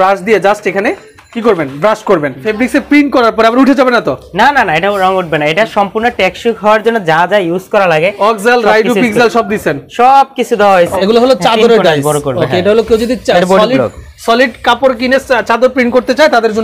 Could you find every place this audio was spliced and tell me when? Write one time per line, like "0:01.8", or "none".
0:02.5
0:11.0